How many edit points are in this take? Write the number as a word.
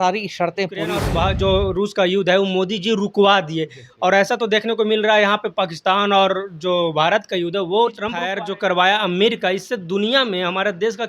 two